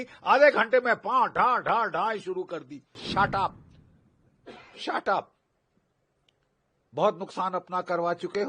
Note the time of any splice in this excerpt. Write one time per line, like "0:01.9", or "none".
0:03.0